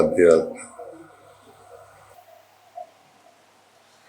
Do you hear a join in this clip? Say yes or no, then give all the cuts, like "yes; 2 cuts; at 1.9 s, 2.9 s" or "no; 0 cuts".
no; 0 cuts